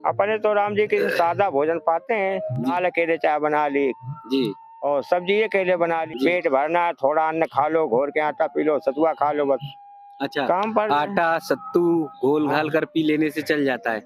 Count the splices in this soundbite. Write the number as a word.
two